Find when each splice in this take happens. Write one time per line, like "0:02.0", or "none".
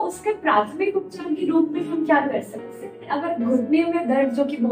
0:03.1